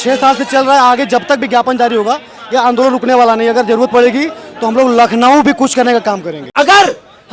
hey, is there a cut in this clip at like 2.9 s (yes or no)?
no